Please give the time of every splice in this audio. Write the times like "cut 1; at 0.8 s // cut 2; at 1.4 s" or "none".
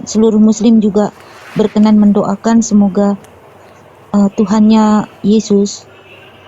none